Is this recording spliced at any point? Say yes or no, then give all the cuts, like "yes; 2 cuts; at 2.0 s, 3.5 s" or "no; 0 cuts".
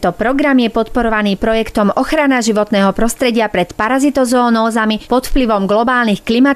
no; 0 cuts